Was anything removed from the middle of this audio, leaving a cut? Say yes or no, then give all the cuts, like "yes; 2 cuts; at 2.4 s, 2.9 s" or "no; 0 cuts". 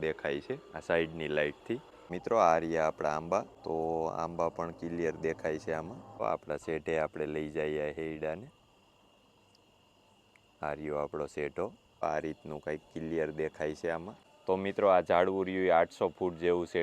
yes; 3 cuts; at 2.1 s, 6.2 s, 12.0 s